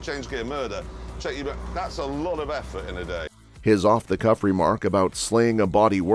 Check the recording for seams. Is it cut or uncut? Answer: uncut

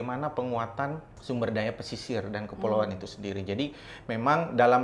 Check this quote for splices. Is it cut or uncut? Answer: uncut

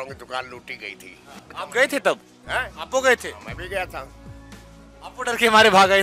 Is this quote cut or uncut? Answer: cut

